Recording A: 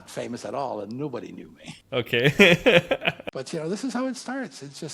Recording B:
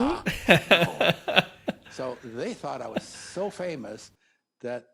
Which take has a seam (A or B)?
A